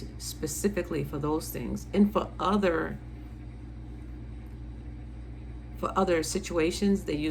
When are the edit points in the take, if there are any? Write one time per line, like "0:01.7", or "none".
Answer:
none